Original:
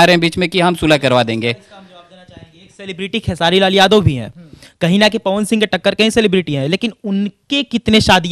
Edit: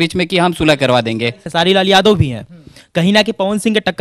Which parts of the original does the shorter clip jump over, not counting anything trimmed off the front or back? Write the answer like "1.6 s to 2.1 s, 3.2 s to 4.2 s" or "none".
1.7 s to 3.3 s